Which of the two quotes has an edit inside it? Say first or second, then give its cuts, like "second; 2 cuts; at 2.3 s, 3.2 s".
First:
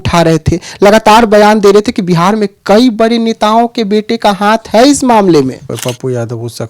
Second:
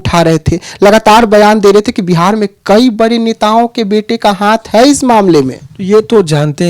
first; 1 cut; at 5.7 s